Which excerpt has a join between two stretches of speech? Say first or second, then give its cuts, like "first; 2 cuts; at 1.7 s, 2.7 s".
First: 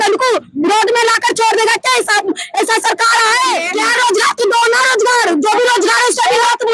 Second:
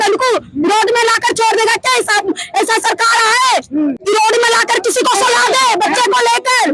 first; 1 cut; at 3.6 s